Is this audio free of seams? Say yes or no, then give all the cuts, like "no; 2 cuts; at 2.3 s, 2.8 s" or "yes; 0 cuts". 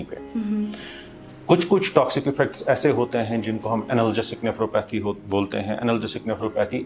yes; 0 cuts